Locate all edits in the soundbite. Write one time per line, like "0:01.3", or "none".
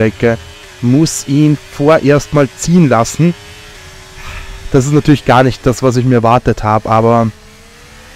none

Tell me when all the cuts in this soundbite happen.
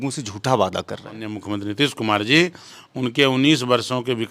0:01.3

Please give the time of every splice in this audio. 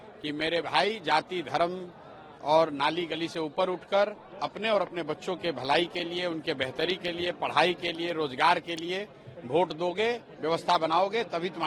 none

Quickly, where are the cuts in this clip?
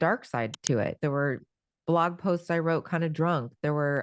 0:01.0

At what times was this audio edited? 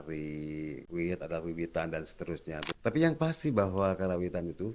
0:00.8
0:02.7

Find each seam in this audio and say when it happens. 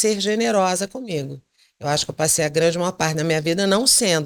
none

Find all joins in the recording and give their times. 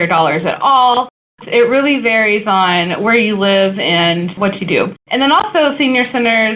0:01.2
0:04.5

